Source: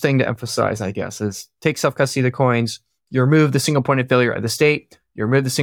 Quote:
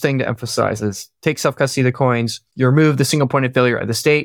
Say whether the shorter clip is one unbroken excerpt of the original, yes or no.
no